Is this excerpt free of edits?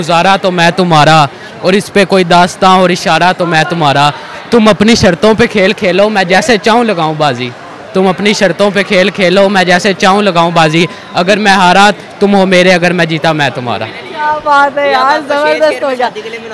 yes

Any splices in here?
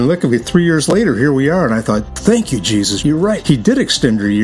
yes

